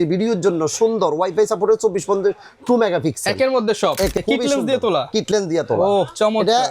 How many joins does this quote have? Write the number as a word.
one